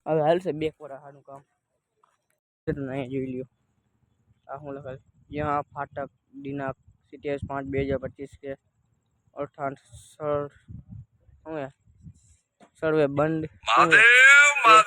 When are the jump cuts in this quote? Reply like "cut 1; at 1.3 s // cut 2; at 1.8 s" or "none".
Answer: cut 1; at 2.4 s

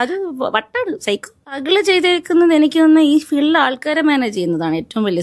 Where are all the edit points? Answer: cut 1; at 1.3 s

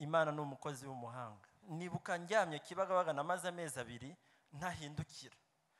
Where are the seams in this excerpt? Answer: cut 1; at 1.6 s

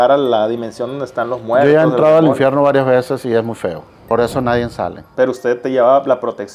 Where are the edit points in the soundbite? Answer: cut 1; at 3.9 s // cut 2; at 5.0 s

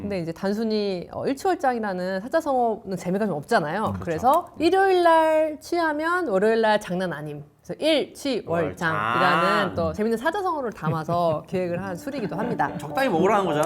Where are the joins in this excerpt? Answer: cut 1; at 4.5 s // cut 2; at 9.9 s

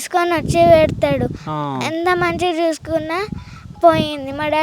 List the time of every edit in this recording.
none

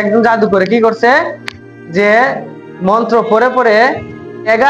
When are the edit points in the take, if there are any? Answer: none

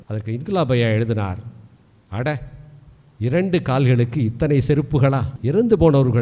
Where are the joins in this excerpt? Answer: cut 1; at 5.3 s

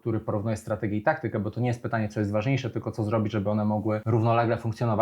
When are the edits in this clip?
cut 1; at 4.0 s

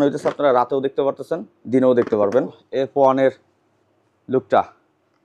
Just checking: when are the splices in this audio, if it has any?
cut 1; at 2.6 s

